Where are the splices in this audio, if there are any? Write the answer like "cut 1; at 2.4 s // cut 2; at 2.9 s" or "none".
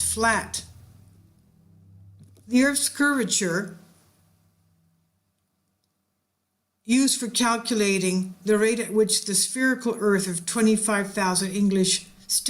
cut 1; at 9.8 s

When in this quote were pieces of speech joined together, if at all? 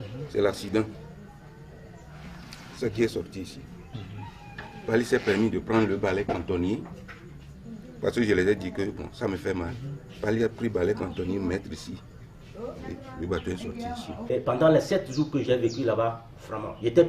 cut 1; at 14.1 s

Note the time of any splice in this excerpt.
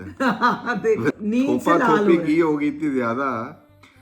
cut 1; at 1.1 s

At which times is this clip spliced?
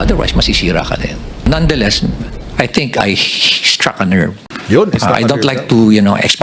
none

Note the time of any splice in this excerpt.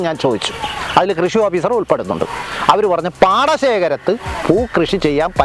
none

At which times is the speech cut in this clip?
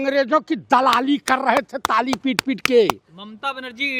none

